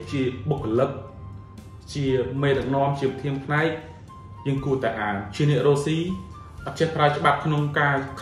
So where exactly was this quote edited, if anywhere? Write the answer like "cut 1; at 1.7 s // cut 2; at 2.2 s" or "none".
none